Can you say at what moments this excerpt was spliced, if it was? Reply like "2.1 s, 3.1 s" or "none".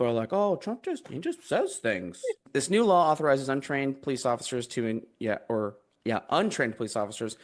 2.4 s